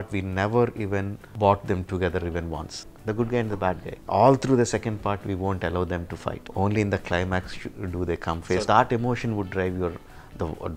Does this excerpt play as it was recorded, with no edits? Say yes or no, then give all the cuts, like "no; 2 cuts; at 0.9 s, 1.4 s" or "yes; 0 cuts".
no; 5 cuts; at 1.2 s, 2.8 s, 3.9 s, 6.4 s, 8.6 s